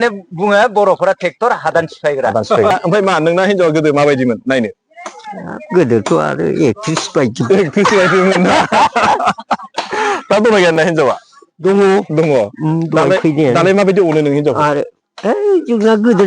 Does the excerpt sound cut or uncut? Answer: cut